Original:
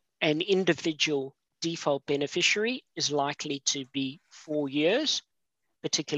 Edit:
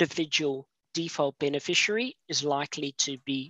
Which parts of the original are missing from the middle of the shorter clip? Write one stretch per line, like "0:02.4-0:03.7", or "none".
none